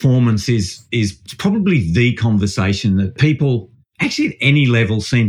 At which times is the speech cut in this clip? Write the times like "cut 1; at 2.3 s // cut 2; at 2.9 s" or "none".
cut 1; at 1.2 s // cut 2; at 3.2 s